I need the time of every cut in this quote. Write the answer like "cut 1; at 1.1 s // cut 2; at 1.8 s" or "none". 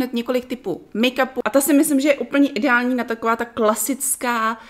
cut 1; at 1.3 s

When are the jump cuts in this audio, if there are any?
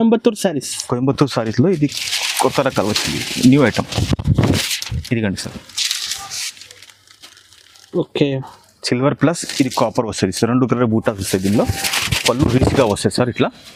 none

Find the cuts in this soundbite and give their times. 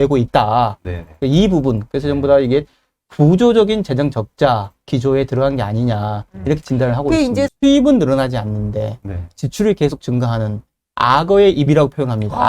cut 1; at 7.5 s

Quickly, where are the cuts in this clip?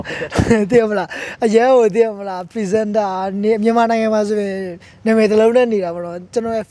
none

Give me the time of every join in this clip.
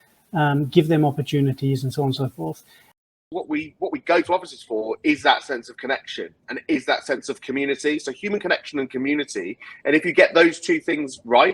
cut 1; at 3.1 s

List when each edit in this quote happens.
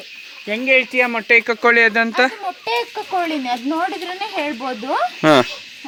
none

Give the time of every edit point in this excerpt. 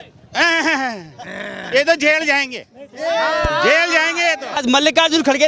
cut 1; at 4.5 s

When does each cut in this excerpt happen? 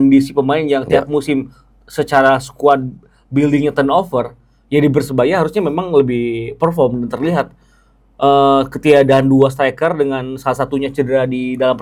none

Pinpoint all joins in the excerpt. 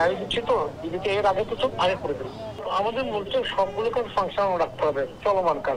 none

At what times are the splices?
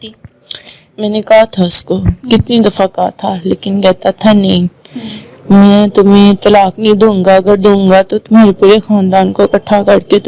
none

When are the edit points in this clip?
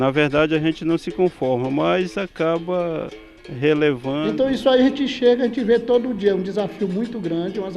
cut 1; at 4.3 s

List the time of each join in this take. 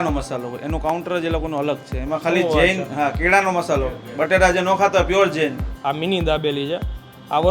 cut 1; at 5.7 s

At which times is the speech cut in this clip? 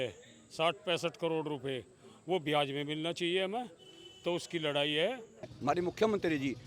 cut 1; at 5.5 s

